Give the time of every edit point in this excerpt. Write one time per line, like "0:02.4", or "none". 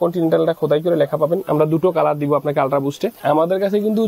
0:03.2